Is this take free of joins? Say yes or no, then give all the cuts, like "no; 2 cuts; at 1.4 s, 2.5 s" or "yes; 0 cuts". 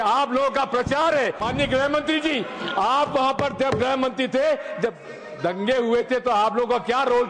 no; 1 cut; at 1.4 s